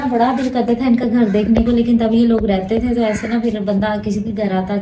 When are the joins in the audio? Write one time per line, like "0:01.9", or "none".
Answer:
none